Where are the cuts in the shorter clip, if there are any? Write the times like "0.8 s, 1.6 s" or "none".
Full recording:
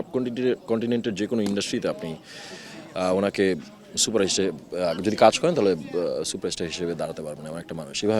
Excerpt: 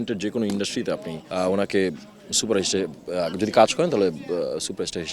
1.2 s